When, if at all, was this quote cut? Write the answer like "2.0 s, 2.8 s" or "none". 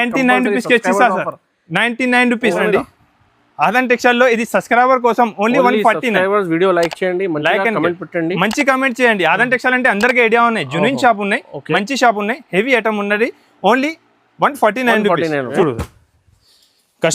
2.6 s, 15.5 s